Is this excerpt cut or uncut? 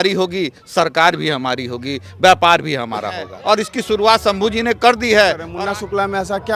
cut